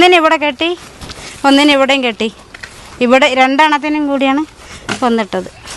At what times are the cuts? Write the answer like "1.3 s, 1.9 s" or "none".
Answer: none